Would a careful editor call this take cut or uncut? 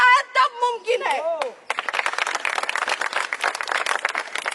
uncut